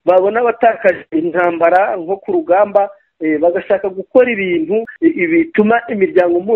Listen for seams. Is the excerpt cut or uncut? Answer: cut